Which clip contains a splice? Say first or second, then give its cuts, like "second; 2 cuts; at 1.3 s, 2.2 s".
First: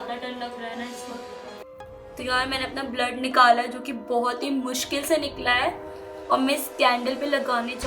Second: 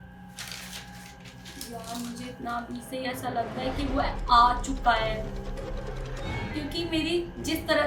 first; 1 cut; at 1.6 s